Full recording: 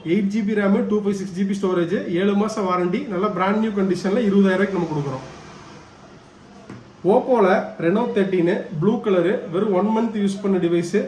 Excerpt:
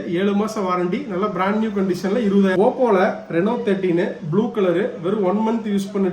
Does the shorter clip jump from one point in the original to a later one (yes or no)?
yes